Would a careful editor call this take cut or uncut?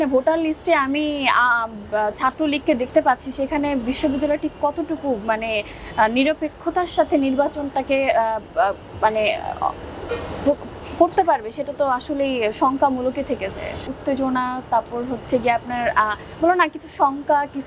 uncut